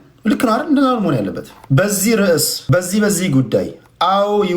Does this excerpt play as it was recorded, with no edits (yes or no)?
no